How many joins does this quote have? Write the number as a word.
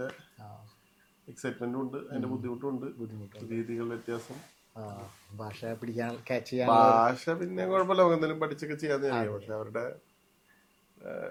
zero